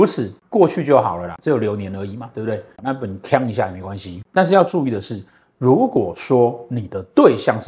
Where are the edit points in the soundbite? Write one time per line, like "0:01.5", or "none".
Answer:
none